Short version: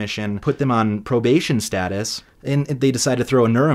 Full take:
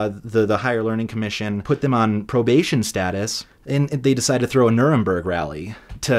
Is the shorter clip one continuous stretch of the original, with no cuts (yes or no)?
yes